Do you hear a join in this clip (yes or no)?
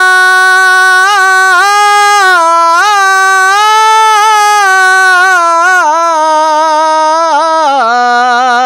no